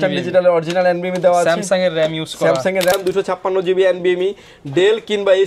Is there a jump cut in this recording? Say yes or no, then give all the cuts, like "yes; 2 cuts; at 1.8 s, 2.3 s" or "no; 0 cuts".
yes; 1 cut; at 2.9 s